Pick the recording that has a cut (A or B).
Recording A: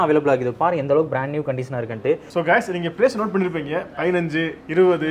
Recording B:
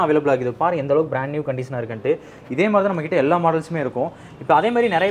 A